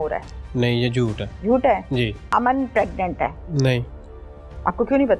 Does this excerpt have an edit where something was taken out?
yes; 3 cuts; at 1.3 s, 2.2 s, 3.4 s

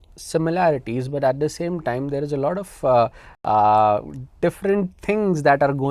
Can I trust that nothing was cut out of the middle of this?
yes; 0 cuts

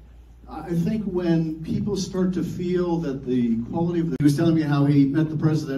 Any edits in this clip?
no; 0 cuts

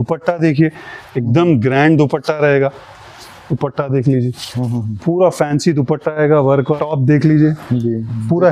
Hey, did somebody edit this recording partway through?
yes; 1 cut; at 6.8 s

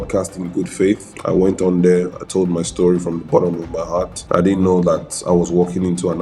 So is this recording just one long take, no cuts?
no; 2 cuts; at 1.1 s, 4.2 s

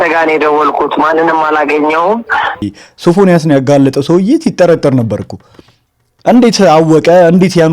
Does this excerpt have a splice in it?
yes; 1 cut; at 2.8 s

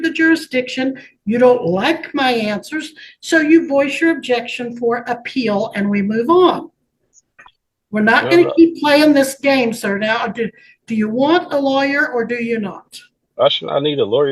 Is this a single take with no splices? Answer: yes; 0 cuts

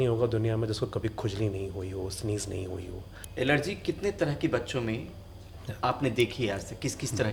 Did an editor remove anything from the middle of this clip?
yes; 1 cut; at 3.2 s

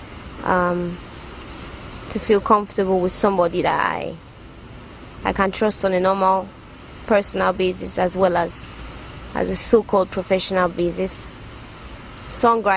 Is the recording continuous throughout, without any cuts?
no; 1 cut; at 3.0 s

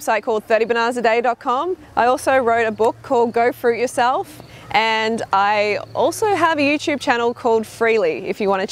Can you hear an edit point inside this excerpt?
yes; 1 cut; at 6.0 s

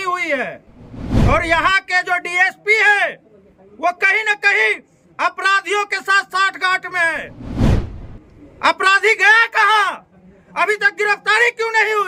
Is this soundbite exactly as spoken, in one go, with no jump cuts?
yes; 0 cuts

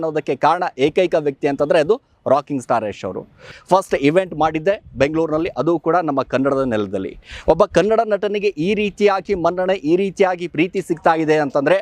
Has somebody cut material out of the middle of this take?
yes; 1 cut; at 3.5 s

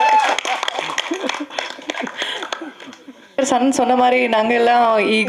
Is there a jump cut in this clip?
yes; 1 cut; at 3.4 s

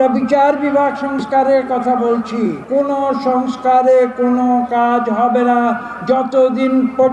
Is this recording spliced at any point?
yes; 1 cut; at 2.6 s

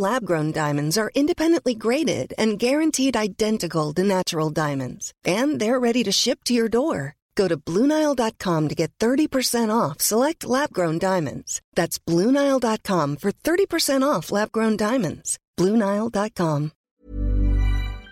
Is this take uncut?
no; 1 cut; at 16.8 s

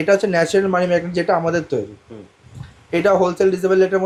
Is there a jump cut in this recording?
no; 0 cuts

